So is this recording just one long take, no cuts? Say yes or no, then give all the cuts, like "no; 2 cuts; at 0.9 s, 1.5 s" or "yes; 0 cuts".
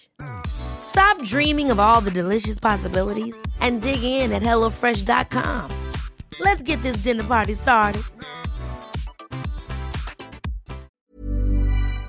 no; 1 cut; at 11.0 s